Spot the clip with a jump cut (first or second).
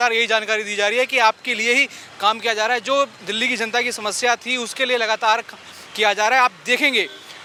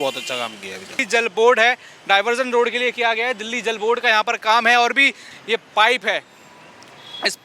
second